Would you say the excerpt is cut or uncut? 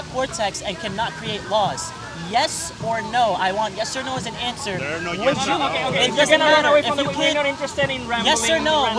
uncut